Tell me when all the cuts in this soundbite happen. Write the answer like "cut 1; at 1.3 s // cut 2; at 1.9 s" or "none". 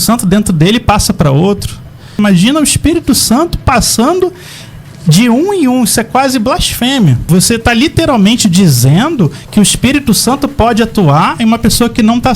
cut 1; at 2.1 s // cut 2; at 7.2 s